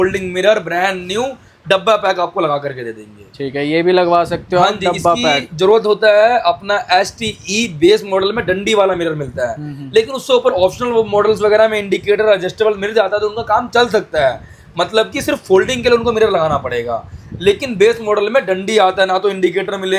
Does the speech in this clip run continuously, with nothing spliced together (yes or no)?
yes